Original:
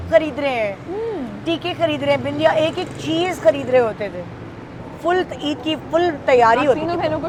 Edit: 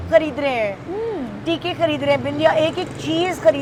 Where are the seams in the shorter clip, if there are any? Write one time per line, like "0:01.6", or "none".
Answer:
none